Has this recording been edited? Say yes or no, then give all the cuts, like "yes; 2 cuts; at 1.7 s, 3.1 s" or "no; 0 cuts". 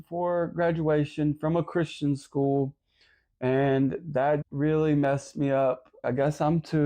yes; 2 cuts; at 4.4 s, 6.0 s